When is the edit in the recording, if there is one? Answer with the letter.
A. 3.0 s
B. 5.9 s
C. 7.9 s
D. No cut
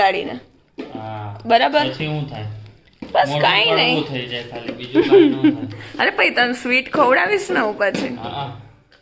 D